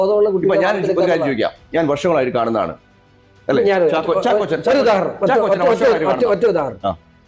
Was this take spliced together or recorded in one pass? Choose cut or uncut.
uncut